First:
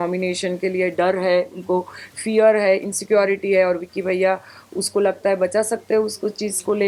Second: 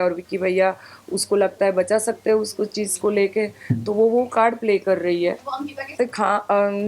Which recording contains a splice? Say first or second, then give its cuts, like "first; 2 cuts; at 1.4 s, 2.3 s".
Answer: second; 1 cut; at 5.9 s